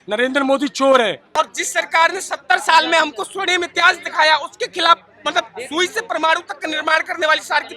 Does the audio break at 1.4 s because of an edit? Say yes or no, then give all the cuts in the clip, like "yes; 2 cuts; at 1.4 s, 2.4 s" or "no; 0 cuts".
yes; 1 cut; at 1.4 s